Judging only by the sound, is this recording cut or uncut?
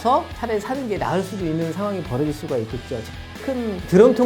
cut